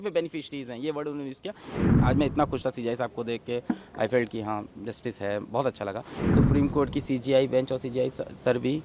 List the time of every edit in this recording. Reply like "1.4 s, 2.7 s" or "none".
1.8 s, 6.2 s